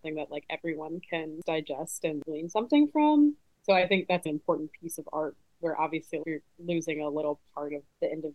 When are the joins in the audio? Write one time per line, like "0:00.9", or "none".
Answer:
0:01.4
0:02.2